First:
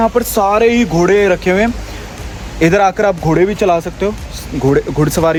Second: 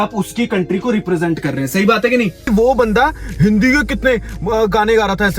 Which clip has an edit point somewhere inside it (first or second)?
second